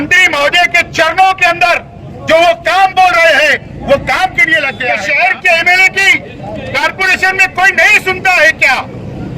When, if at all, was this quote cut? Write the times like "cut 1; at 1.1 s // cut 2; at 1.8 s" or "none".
cut 1; at 4.9 s